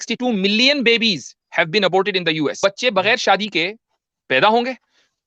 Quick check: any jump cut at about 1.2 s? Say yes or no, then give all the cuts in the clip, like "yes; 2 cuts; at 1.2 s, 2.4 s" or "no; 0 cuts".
no; 1 cut; at 2.6 s